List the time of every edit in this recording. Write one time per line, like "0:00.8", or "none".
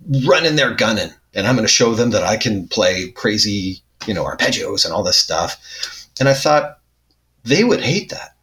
0:01.3